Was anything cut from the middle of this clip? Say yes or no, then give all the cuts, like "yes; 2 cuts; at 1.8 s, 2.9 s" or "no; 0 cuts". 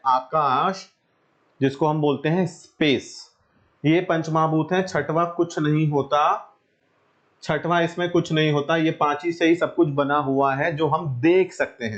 no; 0 cuts